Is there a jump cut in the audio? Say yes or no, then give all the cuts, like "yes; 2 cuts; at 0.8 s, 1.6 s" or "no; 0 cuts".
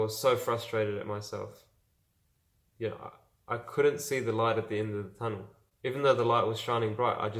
no; 0 cuts